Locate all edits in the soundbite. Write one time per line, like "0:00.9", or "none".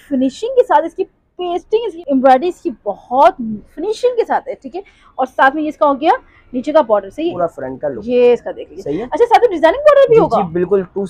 none